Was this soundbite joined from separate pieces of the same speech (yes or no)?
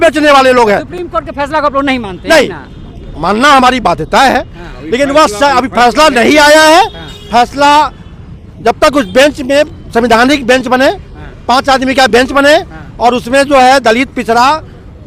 no